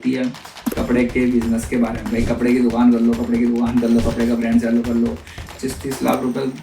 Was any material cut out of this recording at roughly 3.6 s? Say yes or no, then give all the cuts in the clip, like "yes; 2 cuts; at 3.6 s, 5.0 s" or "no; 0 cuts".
no; 1 cut; at 5.5 s